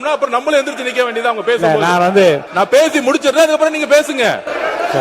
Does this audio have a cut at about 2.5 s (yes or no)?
yes